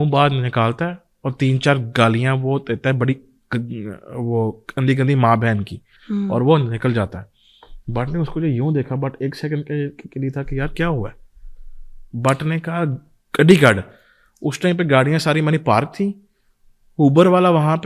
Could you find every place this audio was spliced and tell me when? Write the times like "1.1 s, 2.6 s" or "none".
none